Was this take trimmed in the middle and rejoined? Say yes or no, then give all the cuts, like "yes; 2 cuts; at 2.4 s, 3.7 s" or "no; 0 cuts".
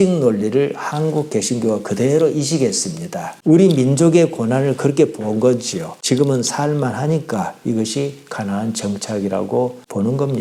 no; 0 cuts